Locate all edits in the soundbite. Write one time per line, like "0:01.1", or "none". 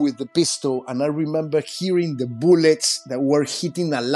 none